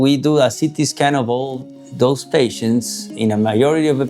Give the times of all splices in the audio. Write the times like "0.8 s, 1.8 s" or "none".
none